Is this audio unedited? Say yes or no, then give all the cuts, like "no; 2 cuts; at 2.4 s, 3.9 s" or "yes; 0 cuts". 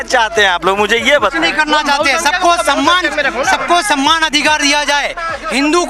yes; 0 cuts